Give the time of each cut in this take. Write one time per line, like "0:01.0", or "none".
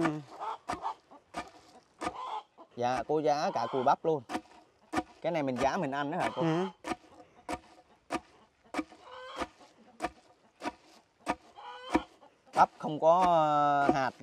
0:02.6

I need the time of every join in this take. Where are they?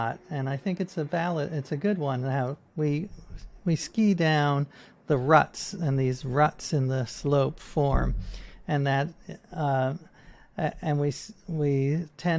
none

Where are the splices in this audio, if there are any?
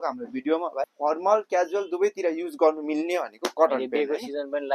0:00.9

